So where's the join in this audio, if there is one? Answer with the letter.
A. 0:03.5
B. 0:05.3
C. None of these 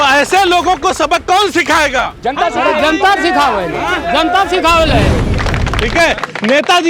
B